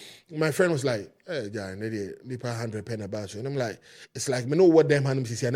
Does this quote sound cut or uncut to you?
uncut